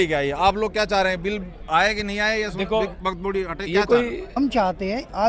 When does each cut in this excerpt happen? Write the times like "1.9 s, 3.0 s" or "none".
4.4 s